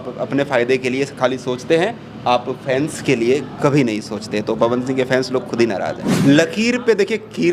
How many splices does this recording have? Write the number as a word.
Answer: one